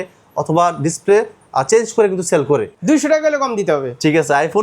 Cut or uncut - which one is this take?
cut